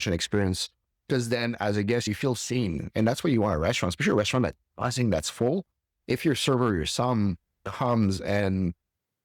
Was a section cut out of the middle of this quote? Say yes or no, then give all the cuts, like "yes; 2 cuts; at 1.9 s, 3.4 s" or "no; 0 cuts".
yes; 1 cut; at 2.1 s